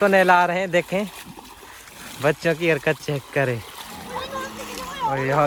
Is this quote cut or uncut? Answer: uncut